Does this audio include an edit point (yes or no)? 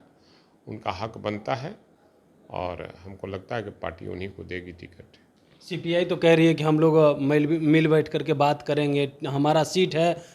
no